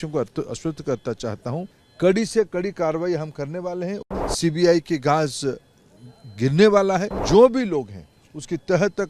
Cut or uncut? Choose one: cut